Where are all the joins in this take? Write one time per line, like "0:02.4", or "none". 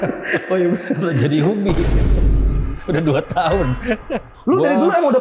0:04.1